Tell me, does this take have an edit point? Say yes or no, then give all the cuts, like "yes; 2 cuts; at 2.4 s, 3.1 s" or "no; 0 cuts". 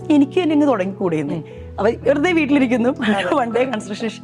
no; 0 cuts